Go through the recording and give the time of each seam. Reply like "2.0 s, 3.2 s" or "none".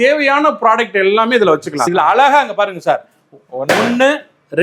1.8 s